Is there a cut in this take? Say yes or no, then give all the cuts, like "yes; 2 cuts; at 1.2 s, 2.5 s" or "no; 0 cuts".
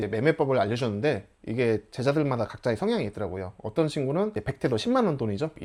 no; 0 cuts